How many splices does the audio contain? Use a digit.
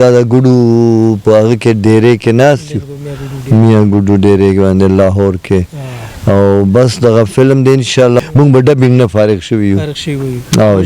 1